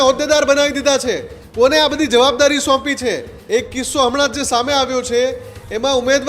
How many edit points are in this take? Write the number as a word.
one